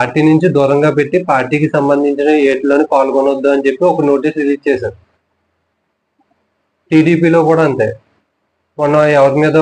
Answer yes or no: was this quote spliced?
no